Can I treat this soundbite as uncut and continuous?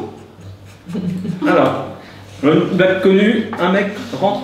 yes; 0 cuts

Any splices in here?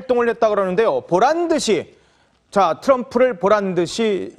yes; 1 cut; at 2.4 s

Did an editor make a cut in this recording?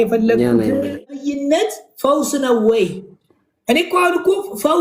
yes; 1 cut; at 1.2 s

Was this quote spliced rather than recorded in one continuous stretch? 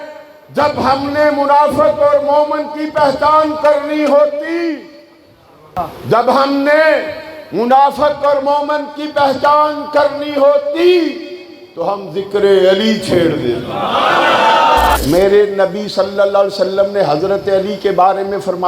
yes; 2 cuts; at 5.8 s, 15.0 s

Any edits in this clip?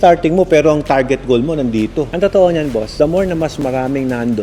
yes; 1 cut; at 2.1 s

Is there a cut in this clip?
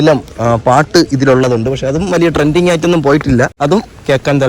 yes; 1 cut; at 3.5 s

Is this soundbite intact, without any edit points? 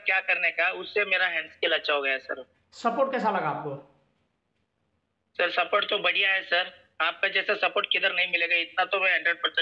yes; 0 cuts

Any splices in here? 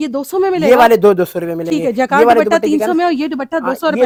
no; 0 cuts

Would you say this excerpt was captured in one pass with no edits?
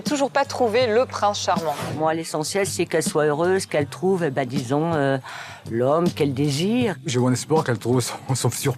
no; 2 cuts; at 1.9 s, 7.0 s

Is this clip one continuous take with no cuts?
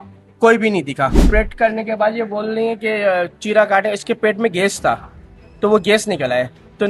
no; 1 cut; at 1.3 s

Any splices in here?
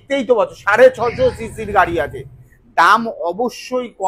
no; 0 cuts

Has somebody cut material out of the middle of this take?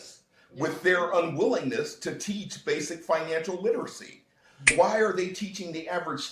yes; 1 cut; at 4.7 s

